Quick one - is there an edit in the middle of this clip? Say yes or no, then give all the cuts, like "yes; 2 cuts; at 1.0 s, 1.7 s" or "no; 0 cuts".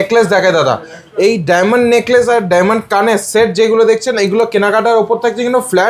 no; 0 cuts